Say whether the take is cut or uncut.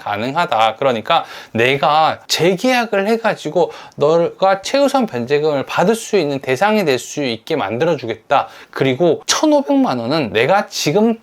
uncut